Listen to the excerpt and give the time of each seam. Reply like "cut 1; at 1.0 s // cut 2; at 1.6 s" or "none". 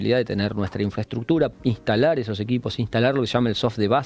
cut 1; at 1.5 s